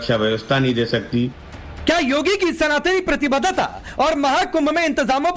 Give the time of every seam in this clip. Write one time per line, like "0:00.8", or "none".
0:01.6